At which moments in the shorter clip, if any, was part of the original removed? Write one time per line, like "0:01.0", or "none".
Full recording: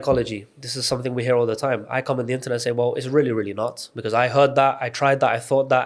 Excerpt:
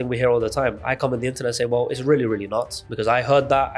none